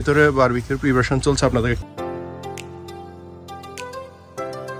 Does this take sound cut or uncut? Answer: cut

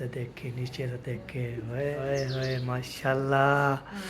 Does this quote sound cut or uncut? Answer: cut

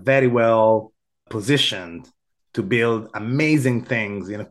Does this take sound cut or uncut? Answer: uncut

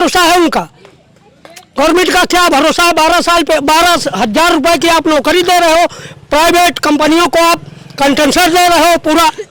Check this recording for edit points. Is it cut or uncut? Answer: uncut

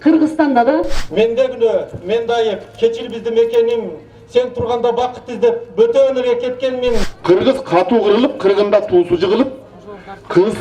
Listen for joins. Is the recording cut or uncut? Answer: cut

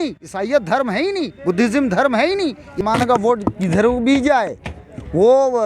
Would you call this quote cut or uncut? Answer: cut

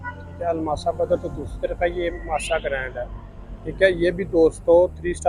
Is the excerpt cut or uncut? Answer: uncut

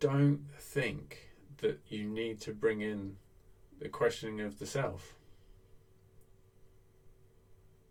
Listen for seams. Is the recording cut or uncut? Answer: uncut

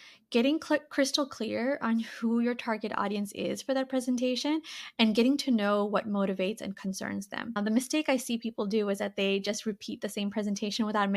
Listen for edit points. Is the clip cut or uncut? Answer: cut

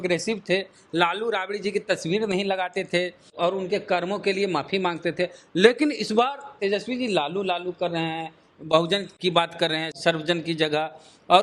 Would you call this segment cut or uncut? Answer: uncut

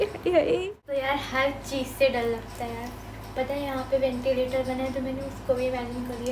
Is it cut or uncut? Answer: cut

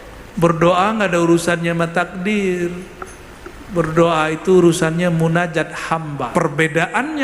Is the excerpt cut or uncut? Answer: cut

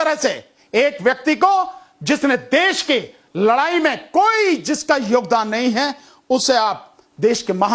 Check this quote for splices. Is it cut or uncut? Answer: uncut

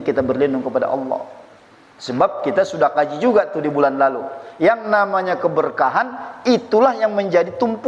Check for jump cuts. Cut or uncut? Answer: uncut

